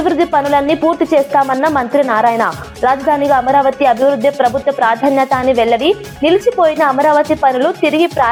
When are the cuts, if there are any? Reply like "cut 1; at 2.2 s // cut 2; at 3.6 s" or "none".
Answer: none